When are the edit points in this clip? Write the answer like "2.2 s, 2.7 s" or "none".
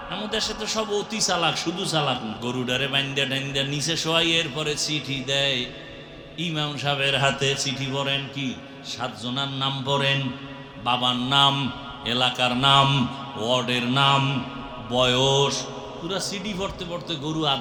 none